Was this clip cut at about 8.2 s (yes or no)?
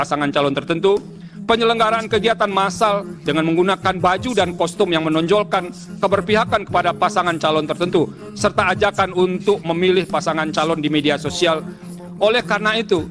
yes